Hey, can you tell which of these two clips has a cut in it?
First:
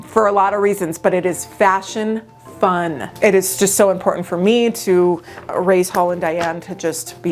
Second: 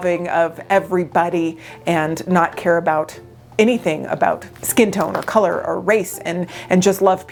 first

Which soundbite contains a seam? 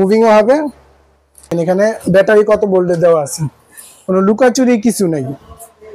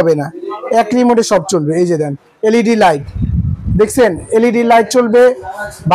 first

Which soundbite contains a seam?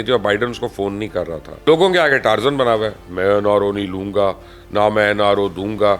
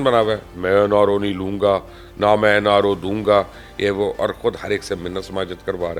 first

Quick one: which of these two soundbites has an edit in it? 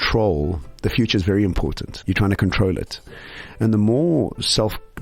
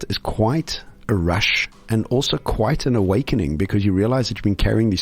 first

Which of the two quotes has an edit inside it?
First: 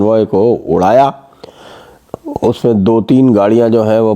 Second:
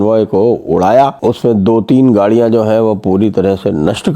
second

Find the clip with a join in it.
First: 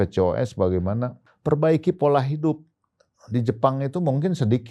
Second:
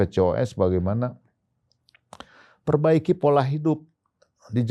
first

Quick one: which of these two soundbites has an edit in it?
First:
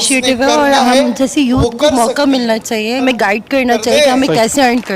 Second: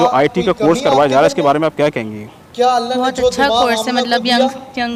first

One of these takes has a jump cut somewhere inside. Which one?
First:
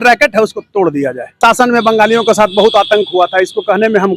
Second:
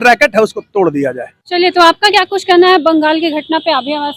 first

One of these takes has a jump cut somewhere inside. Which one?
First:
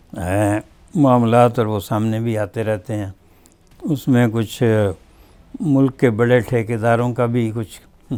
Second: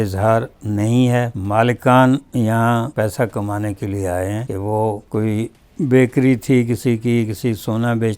second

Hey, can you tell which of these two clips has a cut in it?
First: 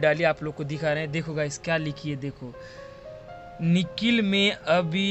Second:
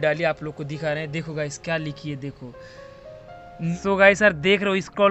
second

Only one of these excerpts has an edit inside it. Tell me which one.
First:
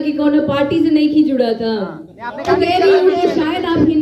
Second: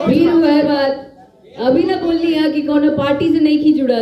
first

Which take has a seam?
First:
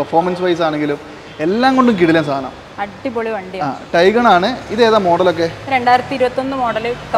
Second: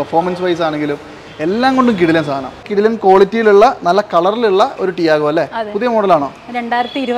second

